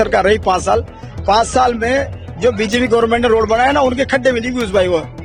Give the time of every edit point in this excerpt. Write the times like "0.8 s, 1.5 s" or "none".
none